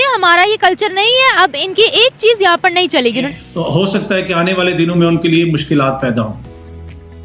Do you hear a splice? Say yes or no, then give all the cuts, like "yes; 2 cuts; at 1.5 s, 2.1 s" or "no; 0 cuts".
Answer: yes; 1 cut; at 3.4 s